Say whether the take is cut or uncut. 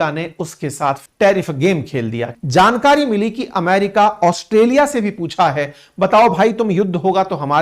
cut